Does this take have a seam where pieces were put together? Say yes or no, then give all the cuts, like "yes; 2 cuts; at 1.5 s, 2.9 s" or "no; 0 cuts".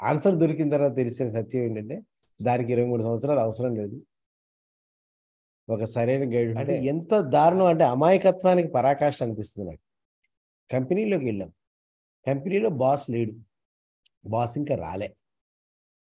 yes; 1 cut; at 6.7 s